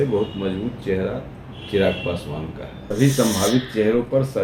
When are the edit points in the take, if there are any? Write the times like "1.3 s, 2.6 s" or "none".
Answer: 2.7 s